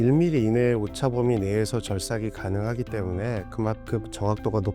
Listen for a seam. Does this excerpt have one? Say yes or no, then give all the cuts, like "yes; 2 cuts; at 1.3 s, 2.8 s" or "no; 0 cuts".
no; 0 cuts